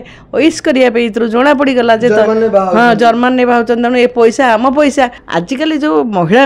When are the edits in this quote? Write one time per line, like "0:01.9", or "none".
0:05.2